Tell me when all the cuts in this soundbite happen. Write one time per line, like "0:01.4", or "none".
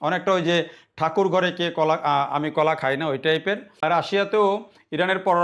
0:03.8